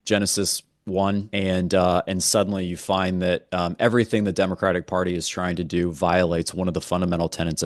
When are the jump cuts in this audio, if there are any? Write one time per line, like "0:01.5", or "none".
0:01.3